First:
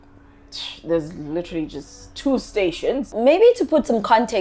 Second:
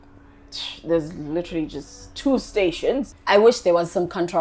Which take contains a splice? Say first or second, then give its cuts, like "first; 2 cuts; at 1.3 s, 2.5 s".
second; 1 cut; at 3.1 s